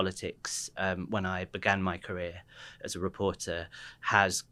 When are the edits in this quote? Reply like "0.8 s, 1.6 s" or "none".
none